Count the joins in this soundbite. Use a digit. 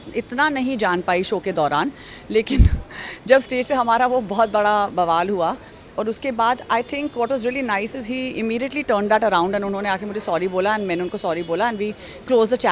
0